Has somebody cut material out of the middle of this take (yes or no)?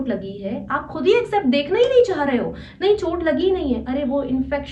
no